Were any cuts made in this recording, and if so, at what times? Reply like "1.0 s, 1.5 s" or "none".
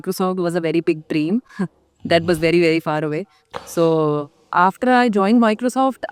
none